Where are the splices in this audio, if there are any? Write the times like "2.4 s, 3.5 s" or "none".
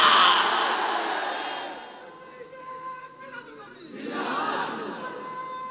2.2 s